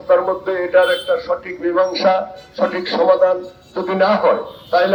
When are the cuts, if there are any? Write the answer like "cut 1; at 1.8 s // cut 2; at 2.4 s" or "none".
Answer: none

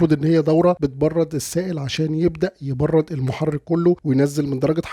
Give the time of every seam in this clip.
cut 1; at 0.8 s // cut 2; at 4.0 s

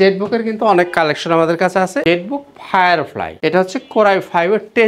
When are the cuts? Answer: cut 1; at 2.0 s // cut 2; at 3.3 s

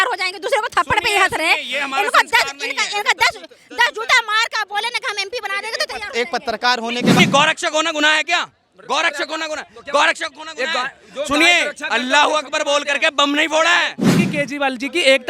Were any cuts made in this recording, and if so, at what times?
cut 1; at 7.2 s // cut 2; at 14.1 s

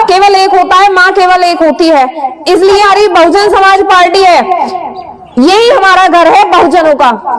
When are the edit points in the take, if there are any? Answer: cut 1; at 2.8 s

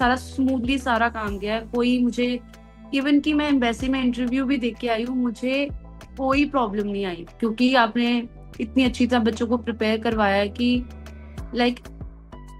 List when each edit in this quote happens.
none

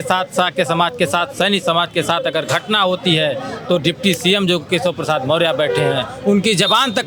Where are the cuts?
none

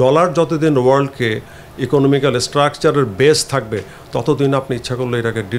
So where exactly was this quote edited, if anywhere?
none

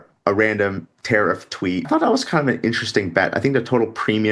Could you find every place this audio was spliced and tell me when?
cut 1; at 1.8 s

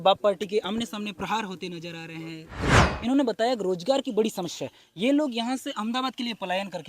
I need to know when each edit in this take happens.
cut 1; at 2.6 s

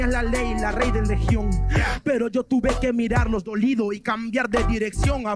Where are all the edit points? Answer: none

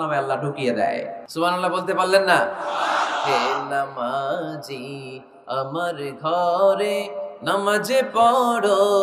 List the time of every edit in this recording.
cut 1; at 1.2 s

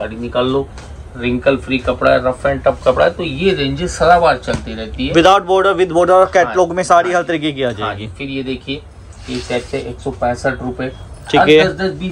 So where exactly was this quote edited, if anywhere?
none

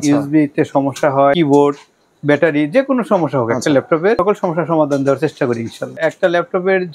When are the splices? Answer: cut 1; at 1.3 s // cut 2; at 4.2 s // cut 3; at 5.9 s

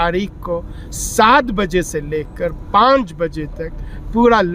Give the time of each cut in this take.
none

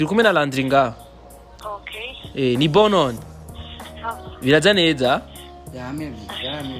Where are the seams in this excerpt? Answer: none

